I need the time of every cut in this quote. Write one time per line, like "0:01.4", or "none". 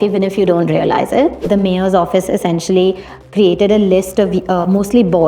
0:01.5

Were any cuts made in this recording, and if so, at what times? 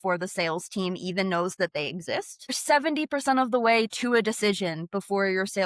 0:02.6

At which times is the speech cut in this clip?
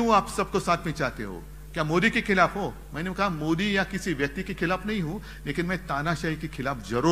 none

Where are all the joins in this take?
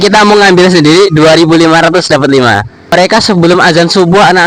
0:02.9

